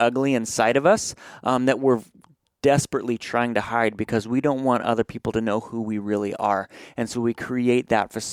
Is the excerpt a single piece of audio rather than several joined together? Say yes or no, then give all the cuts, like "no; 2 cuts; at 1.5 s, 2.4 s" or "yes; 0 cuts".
yes; 0 cuts